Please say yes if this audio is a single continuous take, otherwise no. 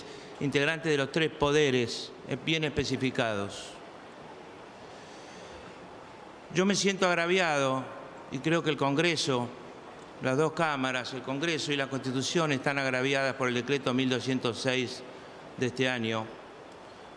no